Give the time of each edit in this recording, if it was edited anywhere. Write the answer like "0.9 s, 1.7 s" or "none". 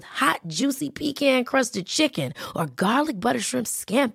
none